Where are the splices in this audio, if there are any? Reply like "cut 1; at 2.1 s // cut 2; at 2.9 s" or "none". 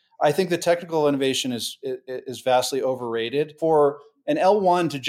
cut 1; at 3.5 s